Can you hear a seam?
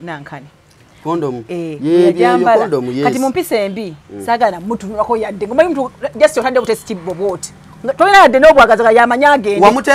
no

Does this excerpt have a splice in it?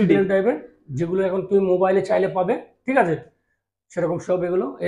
no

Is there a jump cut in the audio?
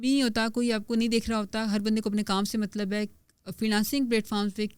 no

